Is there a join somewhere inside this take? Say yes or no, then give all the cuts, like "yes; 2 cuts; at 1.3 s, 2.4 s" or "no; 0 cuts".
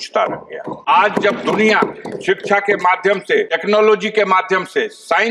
yes; 2 cuts; at 0.9 s, 3.6 s